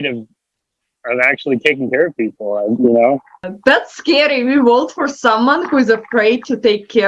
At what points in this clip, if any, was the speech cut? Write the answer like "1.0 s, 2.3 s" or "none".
2.7 s, 3.5 s